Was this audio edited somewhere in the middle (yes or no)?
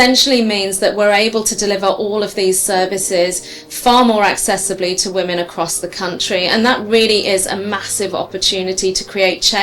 no